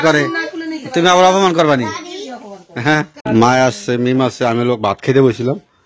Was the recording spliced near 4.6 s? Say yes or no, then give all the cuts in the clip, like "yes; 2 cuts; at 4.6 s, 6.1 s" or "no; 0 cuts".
no; 1 cut; at 3.1 s